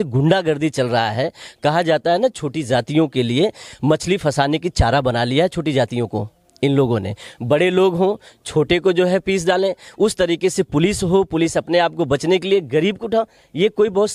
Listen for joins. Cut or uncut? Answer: uncut